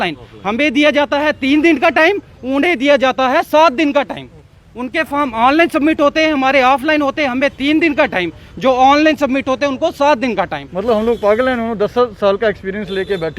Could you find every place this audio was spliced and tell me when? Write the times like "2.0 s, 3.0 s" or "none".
10.6 s